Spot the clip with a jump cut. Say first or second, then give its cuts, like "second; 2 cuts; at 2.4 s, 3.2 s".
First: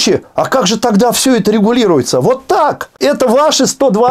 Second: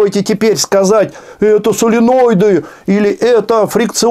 first; 1 cut; at 2.9 s